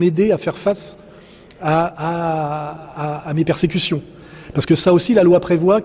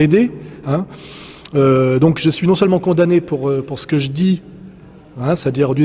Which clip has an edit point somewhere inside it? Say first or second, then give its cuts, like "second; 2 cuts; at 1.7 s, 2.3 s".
second; 1 cut; at 1.5 s